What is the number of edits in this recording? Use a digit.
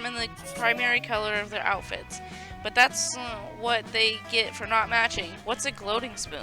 1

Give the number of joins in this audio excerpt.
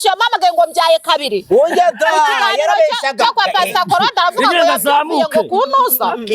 0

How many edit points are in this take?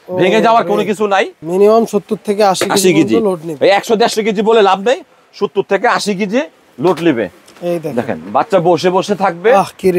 1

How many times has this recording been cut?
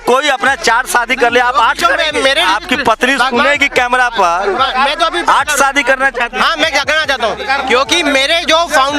2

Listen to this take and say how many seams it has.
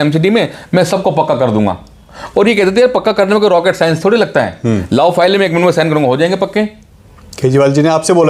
0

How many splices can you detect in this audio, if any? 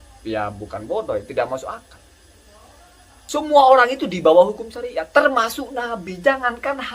1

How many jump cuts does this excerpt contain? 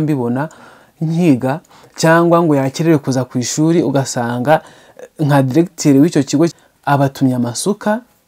1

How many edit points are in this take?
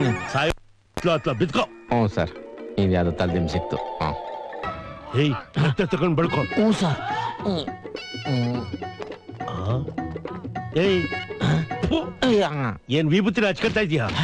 1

